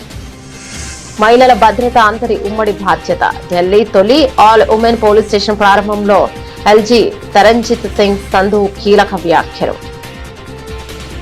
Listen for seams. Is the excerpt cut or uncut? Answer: uncut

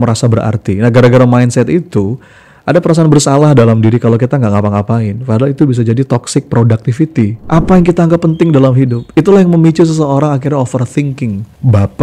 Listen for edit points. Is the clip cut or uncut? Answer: cut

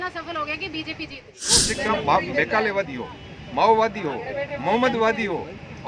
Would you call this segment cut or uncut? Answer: cut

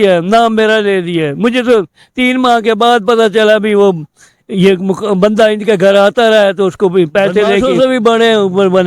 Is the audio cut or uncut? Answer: cut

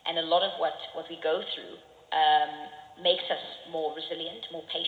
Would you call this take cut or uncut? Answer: uncut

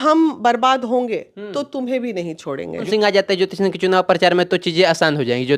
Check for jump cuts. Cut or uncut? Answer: cut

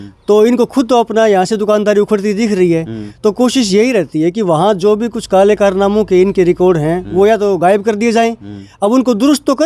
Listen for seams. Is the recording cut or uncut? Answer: uncut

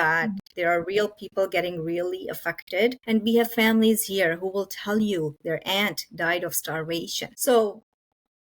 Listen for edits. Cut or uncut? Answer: cut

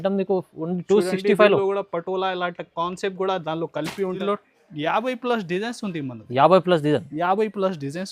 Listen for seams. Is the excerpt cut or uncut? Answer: cut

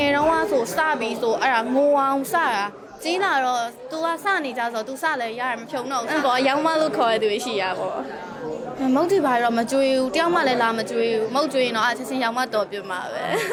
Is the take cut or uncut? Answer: uncut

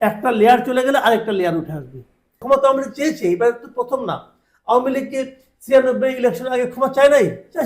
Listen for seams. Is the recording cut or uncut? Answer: cut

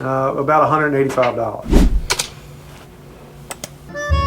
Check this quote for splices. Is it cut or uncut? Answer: cut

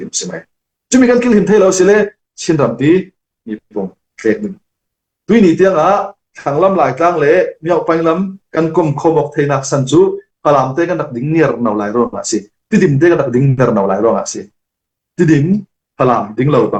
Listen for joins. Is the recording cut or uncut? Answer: uncut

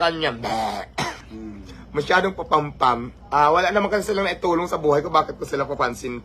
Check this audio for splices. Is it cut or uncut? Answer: cut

